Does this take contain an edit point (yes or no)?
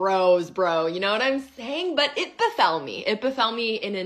yes